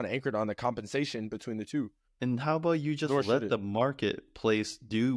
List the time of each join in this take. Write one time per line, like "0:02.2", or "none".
0:02.0

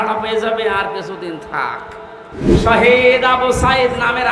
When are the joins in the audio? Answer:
0:02.6

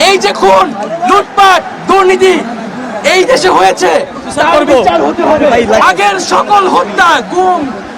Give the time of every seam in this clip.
0:05.8

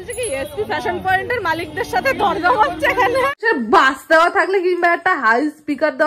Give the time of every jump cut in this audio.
0:03.4

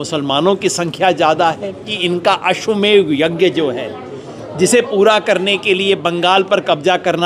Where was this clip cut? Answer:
0:01.9

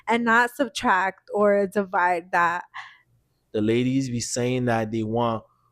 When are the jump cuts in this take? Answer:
0:03.1

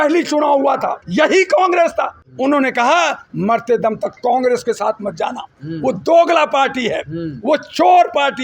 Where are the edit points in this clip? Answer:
0:01.0
0:02.2

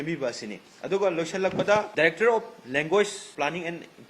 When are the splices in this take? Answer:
0:01.9
0:03.2

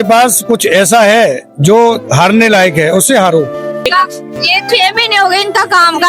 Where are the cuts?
0:03.6

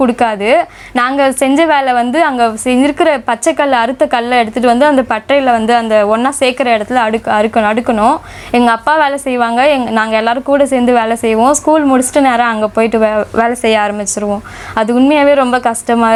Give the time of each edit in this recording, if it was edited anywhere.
none

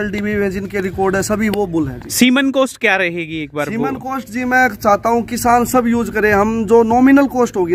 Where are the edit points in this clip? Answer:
none

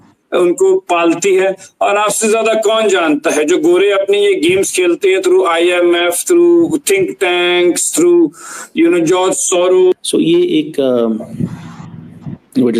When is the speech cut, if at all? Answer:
0:09.9

